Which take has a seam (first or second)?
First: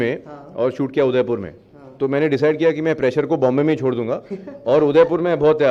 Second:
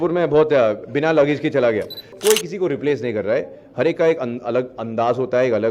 second